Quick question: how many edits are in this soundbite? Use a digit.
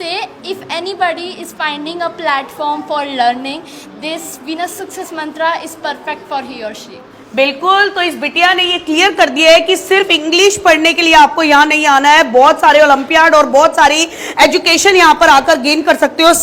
0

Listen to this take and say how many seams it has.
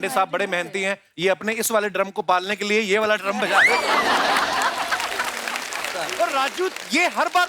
1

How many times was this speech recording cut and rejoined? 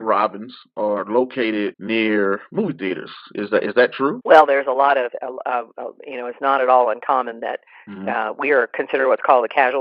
2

